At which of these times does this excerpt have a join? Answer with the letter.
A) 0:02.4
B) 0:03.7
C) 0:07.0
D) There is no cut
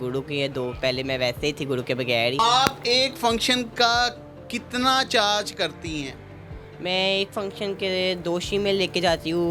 A